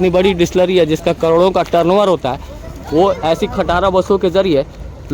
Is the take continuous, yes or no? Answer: yes